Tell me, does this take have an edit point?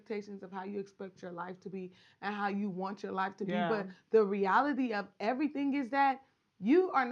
no; 0 cuts

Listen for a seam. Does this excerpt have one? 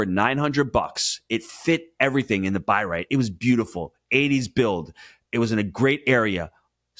no; 0 cuts

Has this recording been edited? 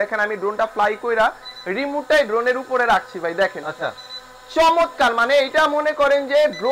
no; 0 cuts

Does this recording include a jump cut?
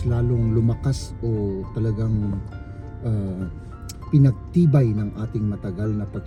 no; 0 cuts

